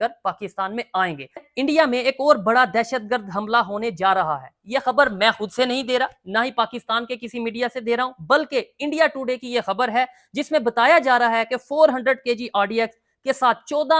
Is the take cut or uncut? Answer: cut